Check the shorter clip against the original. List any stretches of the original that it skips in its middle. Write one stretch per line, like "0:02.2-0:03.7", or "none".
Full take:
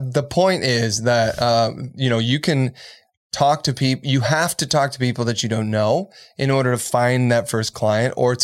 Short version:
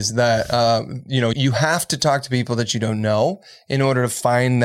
0:02.2-0:04.0